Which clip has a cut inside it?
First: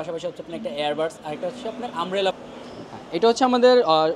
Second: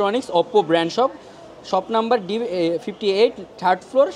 first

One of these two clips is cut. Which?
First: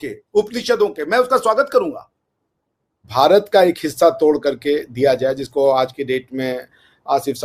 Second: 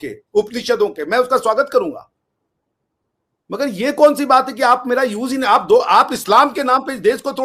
first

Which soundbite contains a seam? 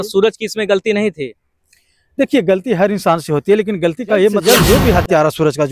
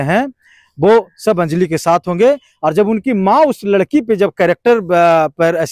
first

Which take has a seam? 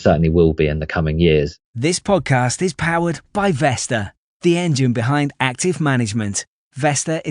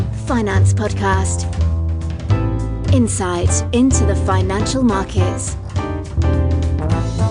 first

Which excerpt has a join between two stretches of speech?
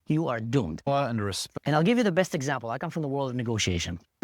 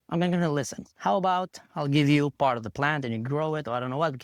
first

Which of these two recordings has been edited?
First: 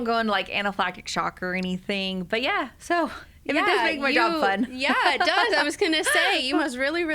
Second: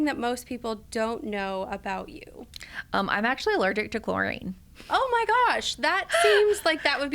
first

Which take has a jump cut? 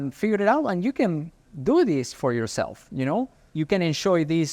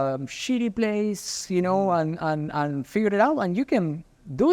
first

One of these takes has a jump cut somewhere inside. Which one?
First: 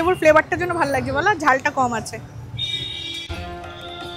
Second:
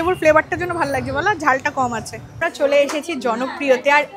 second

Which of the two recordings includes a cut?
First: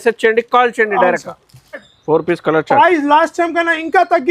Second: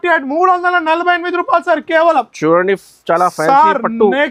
first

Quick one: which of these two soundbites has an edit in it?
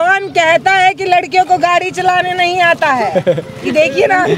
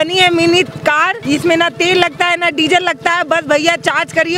second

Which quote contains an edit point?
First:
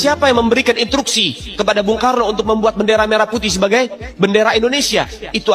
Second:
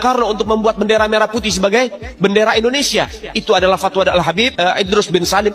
second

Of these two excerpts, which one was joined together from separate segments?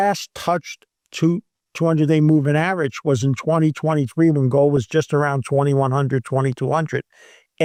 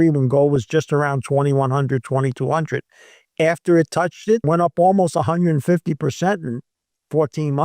second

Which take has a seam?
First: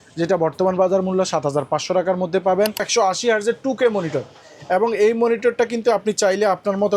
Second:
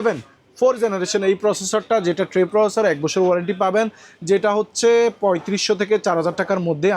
first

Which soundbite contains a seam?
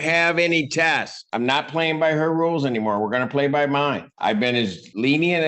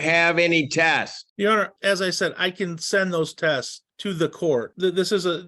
first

